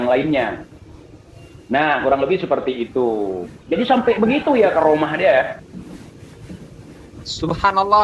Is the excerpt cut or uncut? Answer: uncut